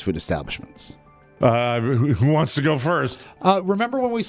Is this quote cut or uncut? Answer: cut